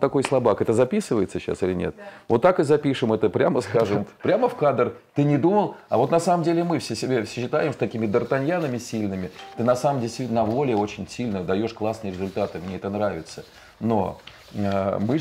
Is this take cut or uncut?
uncut